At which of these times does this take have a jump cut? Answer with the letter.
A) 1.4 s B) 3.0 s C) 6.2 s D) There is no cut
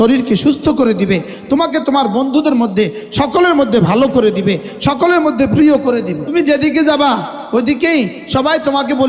C